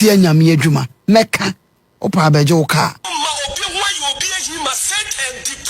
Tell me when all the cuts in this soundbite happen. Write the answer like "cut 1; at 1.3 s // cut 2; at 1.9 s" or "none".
cut 1; at 3.1 s